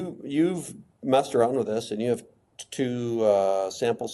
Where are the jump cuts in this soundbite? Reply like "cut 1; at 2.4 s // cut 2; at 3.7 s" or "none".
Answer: none